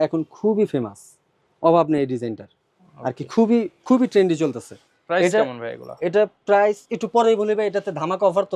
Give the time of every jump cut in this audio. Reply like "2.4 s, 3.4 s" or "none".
none